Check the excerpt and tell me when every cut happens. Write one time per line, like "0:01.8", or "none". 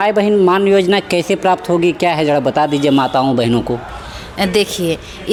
none

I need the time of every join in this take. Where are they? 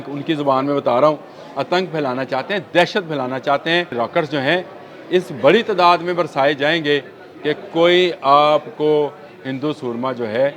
0:03.9

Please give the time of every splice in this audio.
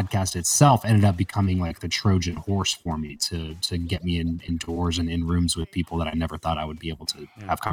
none

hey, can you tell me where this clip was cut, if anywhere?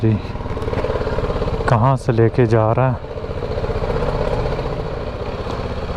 0:05.0

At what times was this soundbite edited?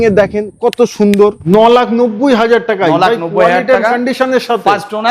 0:01.4

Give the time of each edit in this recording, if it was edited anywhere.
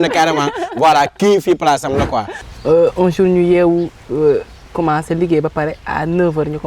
0:02.4

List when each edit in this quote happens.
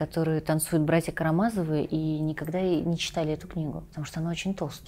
0:03.9

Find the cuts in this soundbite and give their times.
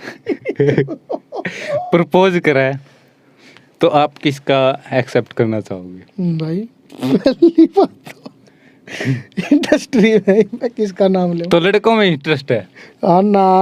none

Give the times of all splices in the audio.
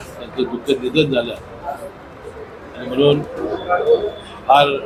none

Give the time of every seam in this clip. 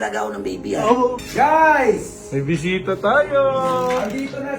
0:01.2

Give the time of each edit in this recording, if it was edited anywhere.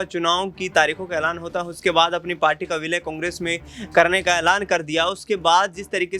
none

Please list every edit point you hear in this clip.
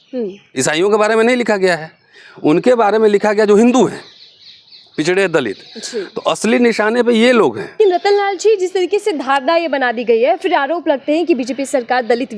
0:07.6

